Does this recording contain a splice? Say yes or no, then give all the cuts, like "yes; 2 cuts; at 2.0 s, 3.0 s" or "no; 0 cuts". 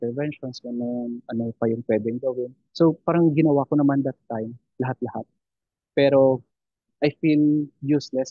yes; 1 cut; at 6.8 s